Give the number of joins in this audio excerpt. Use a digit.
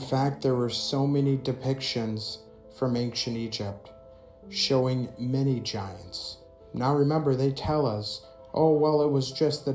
0